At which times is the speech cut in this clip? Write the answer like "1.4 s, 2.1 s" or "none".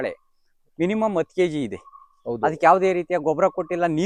none